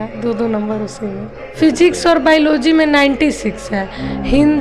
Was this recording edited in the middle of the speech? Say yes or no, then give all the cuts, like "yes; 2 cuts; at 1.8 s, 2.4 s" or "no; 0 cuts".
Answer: yes; 1 cut; at 1.4 s